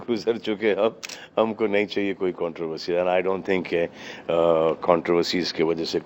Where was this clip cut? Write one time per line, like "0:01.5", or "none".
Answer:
none